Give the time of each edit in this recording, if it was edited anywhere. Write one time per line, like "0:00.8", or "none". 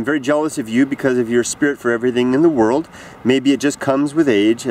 0:01.1